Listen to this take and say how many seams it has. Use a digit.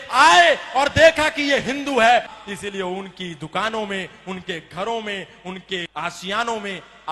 2